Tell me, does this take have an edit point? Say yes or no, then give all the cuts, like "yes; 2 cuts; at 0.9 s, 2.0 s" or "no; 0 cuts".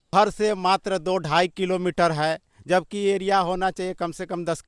no; 0 cuts